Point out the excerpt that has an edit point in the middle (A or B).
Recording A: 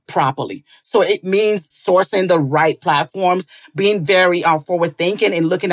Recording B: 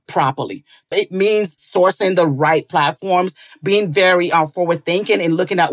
B